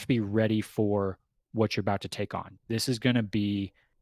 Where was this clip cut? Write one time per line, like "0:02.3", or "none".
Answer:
0:02.5